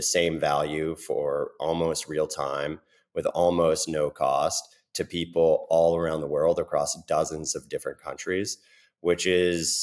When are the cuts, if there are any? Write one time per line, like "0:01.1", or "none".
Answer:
none